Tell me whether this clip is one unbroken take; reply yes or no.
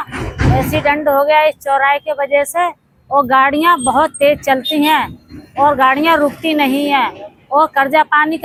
yes